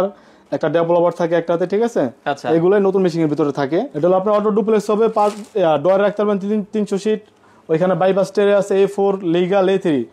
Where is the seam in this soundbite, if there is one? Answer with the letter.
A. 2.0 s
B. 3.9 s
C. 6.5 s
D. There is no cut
B